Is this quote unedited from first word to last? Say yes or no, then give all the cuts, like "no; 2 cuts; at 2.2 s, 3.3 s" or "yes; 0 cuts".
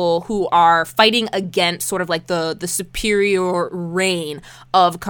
yes; 0 cuts